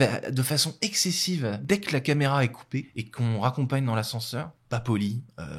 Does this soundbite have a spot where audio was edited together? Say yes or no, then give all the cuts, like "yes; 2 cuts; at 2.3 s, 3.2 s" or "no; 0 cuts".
yes; 3 cuts; at 1.6 s, 3.0 s, 4.6 s